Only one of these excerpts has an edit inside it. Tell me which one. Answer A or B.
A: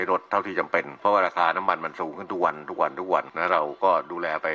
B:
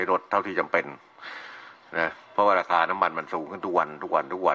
A